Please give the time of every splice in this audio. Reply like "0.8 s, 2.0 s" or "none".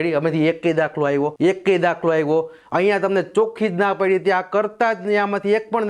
1.3 s